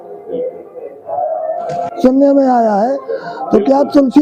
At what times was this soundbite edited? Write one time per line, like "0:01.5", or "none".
0:01.9

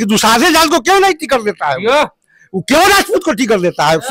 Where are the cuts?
none

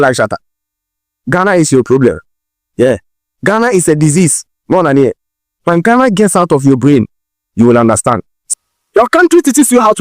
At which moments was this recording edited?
0:08.3

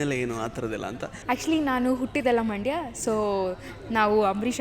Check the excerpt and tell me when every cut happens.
0:01.1

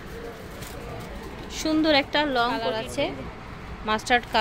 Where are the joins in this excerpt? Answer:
0:02.8

